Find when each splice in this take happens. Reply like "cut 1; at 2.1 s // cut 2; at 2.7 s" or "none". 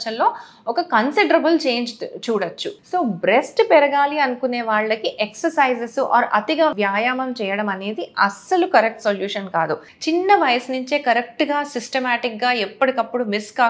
cut 1; at 2.6 s // cut 2; at 9.9 s

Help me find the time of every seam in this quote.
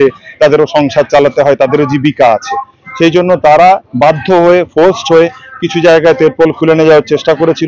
none

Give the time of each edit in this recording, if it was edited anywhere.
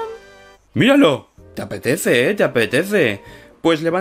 none

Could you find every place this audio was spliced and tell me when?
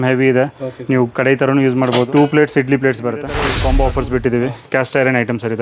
cut 1; at 2.1 s // cut 2; at 3.5 s

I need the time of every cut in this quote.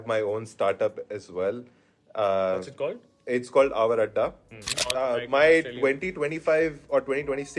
cut 1; at 4.9 s

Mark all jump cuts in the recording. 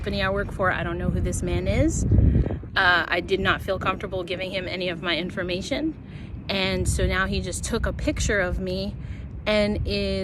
none

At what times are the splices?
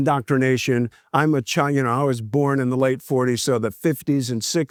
none

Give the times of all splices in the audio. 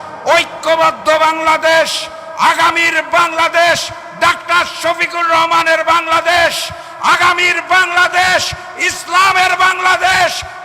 none

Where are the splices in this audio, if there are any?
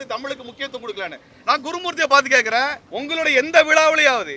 cut 1; at 2.9 s

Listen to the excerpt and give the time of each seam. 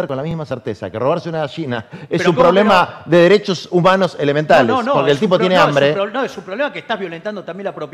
none

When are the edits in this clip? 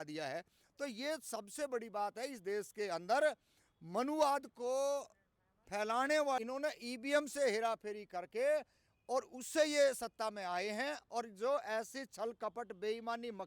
cut 1; at 6.4 s

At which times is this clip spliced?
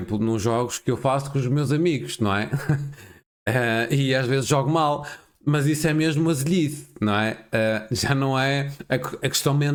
none

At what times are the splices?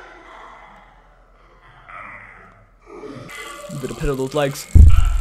cut 1; at 3.3 s

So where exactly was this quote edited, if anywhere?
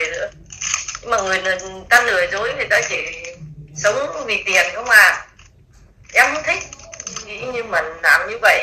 cut 1; at 7.3 s

